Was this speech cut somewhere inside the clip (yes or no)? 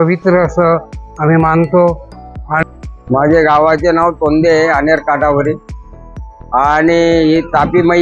yes